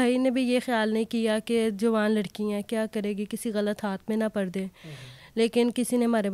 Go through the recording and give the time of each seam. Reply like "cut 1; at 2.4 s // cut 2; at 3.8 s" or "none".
none